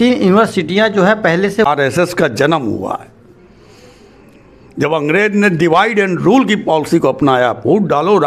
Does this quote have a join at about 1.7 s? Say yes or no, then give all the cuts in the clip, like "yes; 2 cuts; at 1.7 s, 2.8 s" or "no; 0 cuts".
yes; 1 cut; at 1.7 s